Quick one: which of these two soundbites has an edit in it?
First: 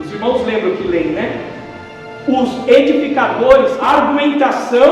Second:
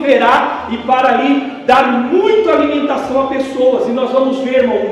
first; 1 cut; at 3.8 s

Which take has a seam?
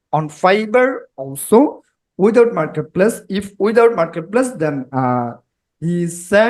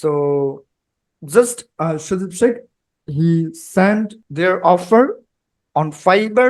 second; 1 cut; at 4.2 s

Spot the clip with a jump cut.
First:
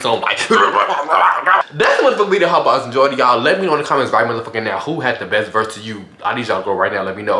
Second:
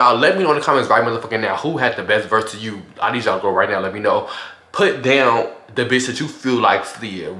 first; 1 cut; at 1.6 s

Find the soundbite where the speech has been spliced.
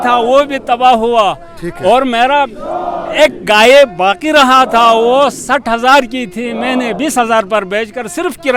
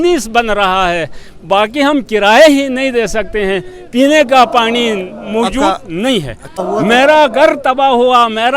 second; 1 cut; at 6.5 s

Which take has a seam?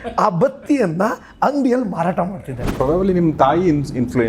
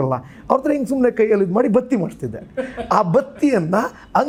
first; 1 cut; at 2.7 s

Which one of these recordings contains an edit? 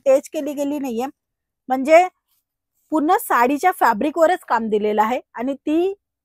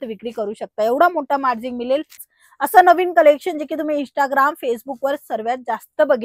second; 1 cut; at 2.2 s

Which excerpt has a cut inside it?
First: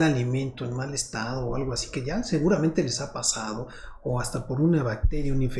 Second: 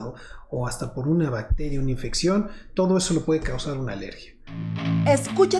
second; 1 cut; at 4.7 s

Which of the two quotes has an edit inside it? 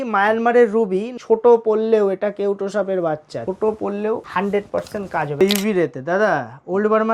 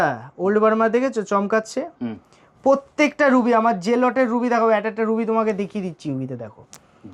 first; 4 cuts; at 1.1 s, 3.3 s, 4.3 s, 5.4 s

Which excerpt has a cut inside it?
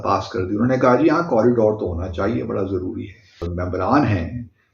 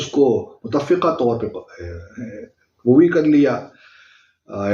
first; 1 cut; at 3.5 s

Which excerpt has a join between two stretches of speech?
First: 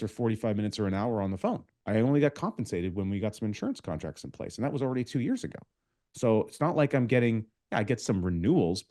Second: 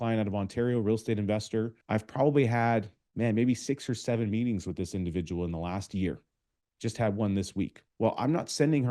second; 3 cuts; at 1.8 s, 3.0 s, 7.8 s

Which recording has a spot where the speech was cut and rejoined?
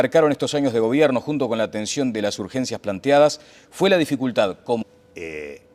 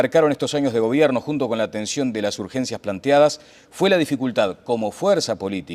second; 1 cut; at 4.8 s

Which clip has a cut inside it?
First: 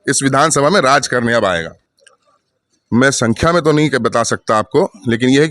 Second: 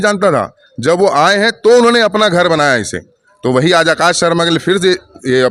first; 1 cut; at 1.9 s

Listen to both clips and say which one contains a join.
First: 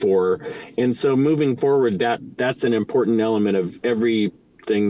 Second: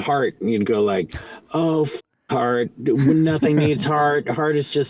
first; 2 cuts; at 2.3 s, 3.7 s

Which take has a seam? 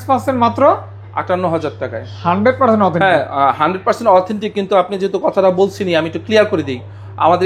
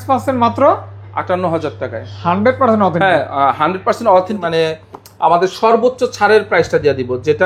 second; 1 cut; at 4.4 s

